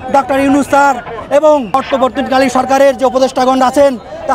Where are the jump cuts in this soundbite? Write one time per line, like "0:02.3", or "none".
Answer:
0:01.7